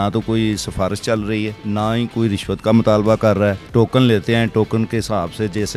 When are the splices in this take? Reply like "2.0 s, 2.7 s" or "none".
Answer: 1.6 s, 3.6 s